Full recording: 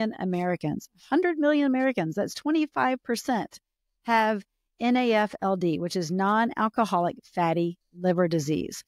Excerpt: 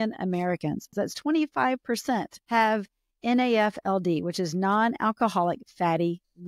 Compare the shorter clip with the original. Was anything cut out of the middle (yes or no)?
yes